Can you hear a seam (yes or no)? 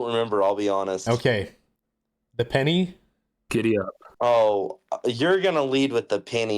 no